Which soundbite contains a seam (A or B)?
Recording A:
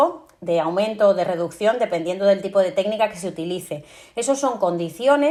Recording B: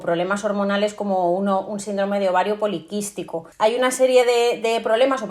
B